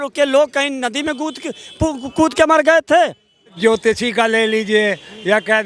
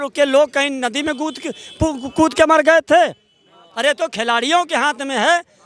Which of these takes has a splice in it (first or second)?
first